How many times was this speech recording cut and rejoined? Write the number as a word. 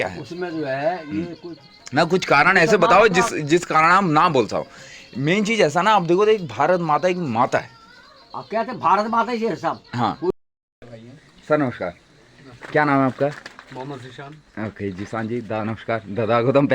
one